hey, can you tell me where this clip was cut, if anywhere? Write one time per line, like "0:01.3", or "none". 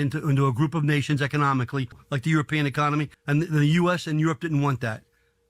0:02.0
0:03.2

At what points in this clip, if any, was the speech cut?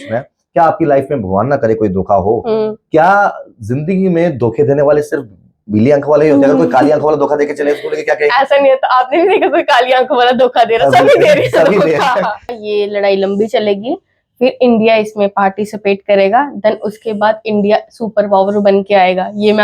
0:12.6

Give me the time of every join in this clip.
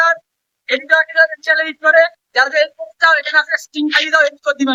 none

